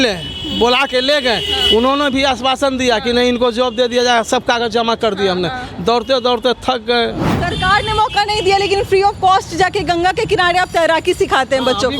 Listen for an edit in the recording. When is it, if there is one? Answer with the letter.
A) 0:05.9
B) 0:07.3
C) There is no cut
B